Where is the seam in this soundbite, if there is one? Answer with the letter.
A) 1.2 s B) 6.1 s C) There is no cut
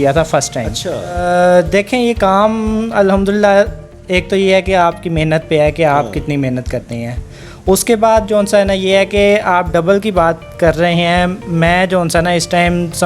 A